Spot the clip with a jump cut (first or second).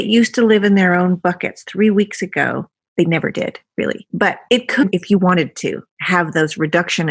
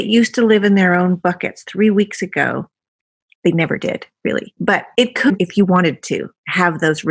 first